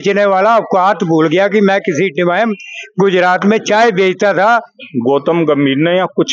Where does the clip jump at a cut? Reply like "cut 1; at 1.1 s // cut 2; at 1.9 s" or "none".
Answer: cut 1; at 4.8 s